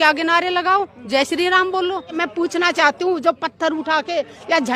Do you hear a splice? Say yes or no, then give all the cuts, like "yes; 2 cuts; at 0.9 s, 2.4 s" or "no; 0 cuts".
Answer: yes; 1 cut; at 2.2 s